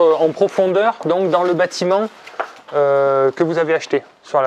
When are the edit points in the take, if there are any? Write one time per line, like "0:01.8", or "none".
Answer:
none